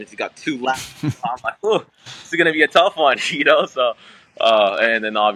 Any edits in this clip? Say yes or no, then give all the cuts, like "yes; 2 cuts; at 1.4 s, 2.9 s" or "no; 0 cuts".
no; 0 cuts